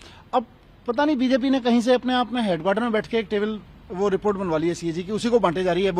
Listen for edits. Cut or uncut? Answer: uncut